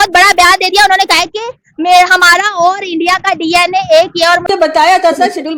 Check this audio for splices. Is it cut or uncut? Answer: cut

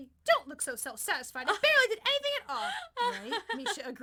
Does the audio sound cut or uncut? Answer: uncut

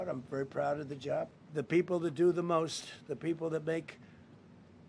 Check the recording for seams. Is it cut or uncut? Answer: cut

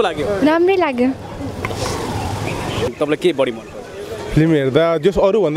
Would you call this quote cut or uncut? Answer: cut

